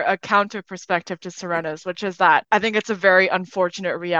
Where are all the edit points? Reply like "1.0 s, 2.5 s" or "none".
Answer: 2.4 s